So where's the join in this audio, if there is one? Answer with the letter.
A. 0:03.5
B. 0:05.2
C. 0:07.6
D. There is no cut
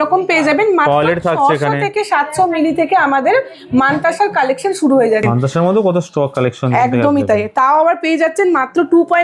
B